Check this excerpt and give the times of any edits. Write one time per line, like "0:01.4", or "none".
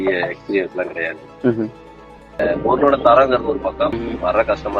0:02.4
0:04.0